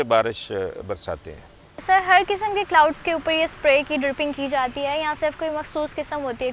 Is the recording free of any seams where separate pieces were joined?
yes; 0 cuts

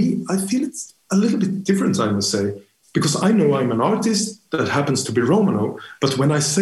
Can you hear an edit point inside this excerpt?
no; 0 cuts

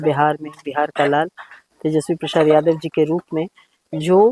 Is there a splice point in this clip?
no; 0 cuts

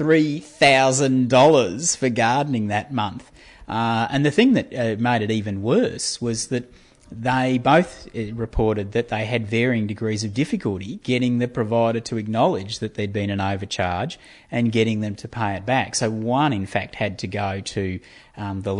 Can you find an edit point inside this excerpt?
no; 0 cuts

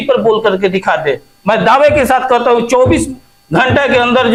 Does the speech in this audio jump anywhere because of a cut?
no; 0 cuts

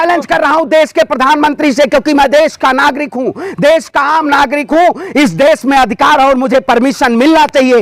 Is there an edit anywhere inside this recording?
no; 0 cuts

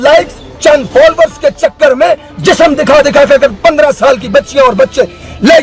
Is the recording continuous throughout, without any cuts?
yes; 0 cuts

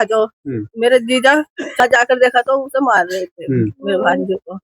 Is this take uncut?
no; 1 cut; at 1.8 s

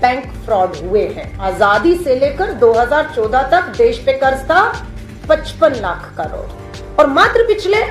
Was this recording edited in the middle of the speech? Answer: yes; 1 cut; at 1.3 s

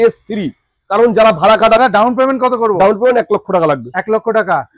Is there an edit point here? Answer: yes; 1 cut; at 1.8 s

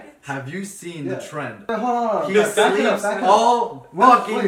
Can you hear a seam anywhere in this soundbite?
yes; 1 cut; at 1.7 s

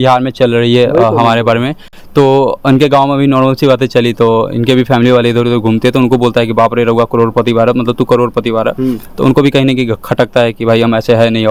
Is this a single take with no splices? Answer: yes; 0 cuts

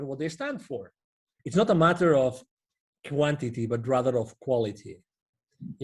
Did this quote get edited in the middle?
yes; 1 cut; at 1.3 s

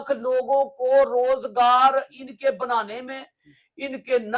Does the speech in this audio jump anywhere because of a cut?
no; 0 cuts

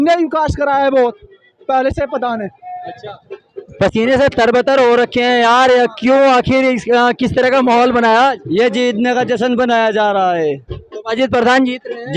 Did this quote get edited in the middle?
no; 0 cuts

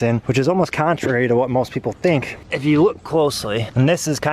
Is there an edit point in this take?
yes; 1 cut; at 2.4 s

